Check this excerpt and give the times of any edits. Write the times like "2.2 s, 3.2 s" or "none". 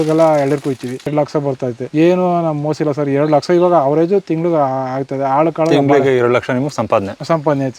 1.4 s